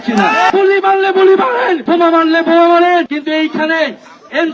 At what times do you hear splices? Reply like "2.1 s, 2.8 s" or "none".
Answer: 0.7 s, 1.8 s, 3.1 s